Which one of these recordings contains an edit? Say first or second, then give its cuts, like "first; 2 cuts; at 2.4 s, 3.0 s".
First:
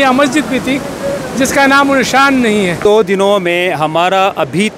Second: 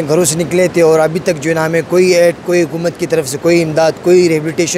first; 1 cut; at 2.8 s